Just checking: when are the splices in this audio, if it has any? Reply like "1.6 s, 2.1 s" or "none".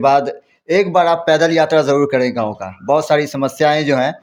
none